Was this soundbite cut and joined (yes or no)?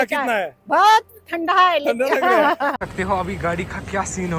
yes